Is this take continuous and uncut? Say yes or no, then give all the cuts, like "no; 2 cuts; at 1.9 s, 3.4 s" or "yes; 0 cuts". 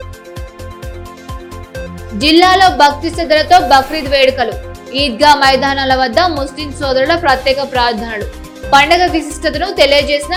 yes; 0 cuts